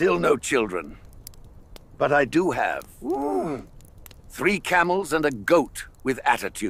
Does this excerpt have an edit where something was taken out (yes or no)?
no